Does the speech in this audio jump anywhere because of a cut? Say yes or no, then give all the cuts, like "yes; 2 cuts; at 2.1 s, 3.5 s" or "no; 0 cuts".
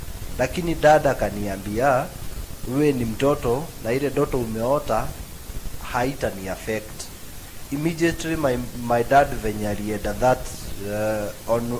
no; 0 cuts